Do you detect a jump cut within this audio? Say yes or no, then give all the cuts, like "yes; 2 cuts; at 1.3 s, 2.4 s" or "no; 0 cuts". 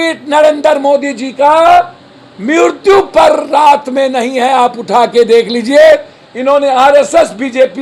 no; 0 cuts